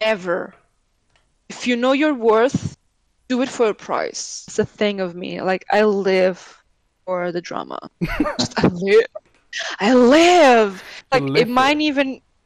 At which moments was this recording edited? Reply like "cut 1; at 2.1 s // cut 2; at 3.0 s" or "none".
cut 1; at 4.5 s